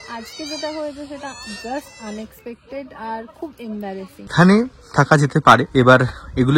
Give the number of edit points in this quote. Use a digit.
2